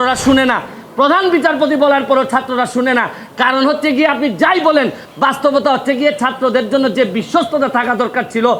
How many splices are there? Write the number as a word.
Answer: zero